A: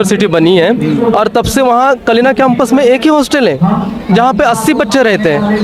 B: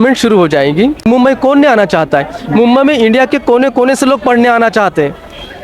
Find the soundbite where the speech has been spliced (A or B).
B